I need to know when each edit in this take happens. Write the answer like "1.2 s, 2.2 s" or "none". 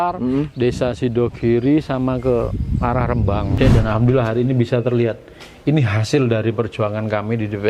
3.5 s